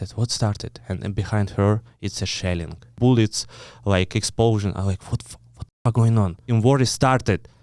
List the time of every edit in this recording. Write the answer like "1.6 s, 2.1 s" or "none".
2.9 s, 6.4 s